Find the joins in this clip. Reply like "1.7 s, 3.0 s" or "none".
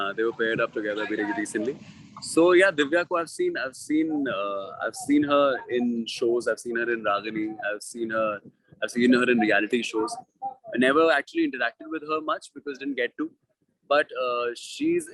none